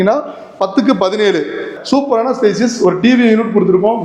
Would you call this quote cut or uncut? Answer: cut